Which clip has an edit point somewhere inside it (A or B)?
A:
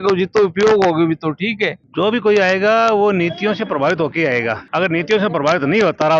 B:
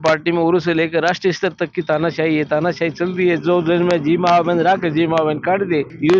A